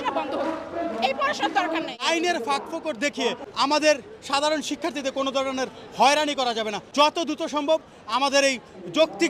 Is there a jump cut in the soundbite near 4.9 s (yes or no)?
no